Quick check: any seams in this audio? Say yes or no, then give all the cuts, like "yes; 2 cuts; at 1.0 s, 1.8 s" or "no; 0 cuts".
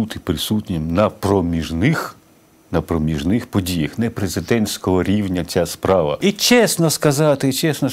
yes; 1 cut; at 6.2 s